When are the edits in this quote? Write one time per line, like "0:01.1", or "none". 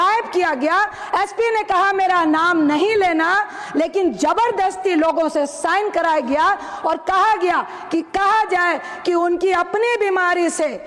none

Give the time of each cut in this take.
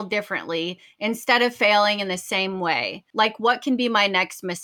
0:03.0

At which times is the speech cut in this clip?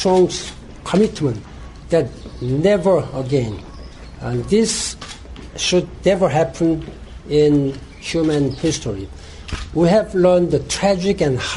none

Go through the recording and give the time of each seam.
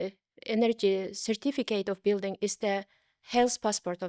none

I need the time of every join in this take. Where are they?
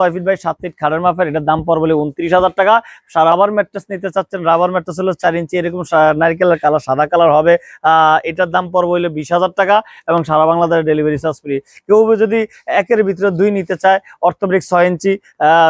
0:03.3

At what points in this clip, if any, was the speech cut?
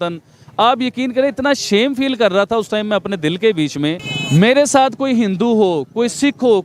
0:04.1

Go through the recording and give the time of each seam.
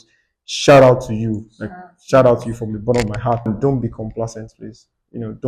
0:03.5

